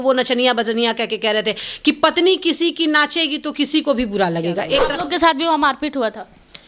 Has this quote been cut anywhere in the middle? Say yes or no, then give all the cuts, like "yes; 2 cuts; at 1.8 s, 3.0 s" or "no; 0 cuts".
yes; 1 cut; at 4.9 s